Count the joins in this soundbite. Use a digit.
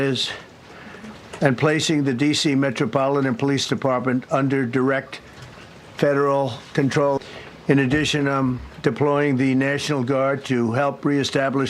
1